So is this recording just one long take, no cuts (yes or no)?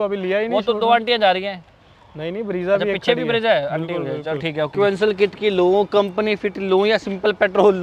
no